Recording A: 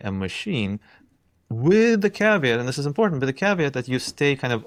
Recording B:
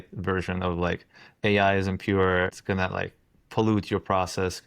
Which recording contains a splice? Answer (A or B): B